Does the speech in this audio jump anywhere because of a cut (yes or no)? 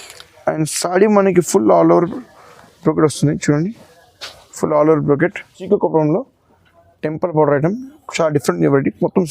yes